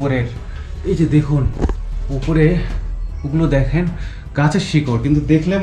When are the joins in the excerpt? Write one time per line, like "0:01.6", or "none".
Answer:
none